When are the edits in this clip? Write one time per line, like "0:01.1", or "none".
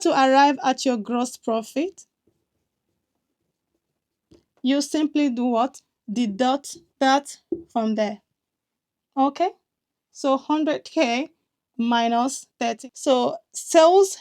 0:12.8